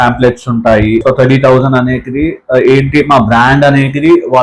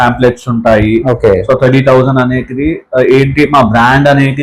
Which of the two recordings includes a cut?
first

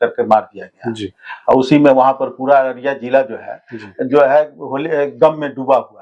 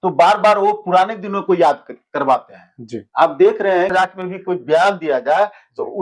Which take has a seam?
second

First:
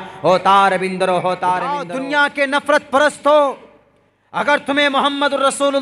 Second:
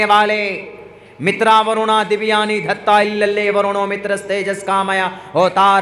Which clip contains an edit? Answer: first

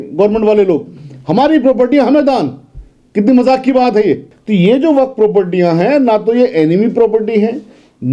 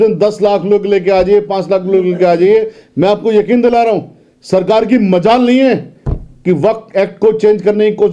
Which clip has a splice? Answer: first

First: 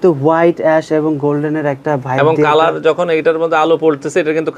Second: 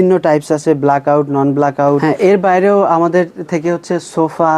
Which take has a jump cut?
second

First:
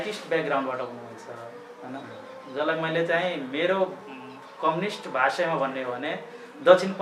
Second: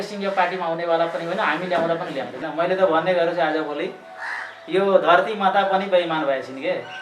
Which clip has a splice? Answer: second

